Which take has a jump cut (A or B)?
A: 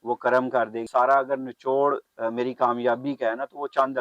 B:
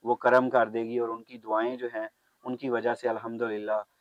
A